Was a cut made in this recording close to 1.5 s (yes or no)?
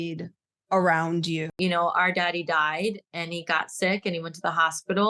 yes